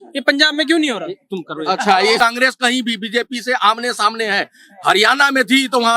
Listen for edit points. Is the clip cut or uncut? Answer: cut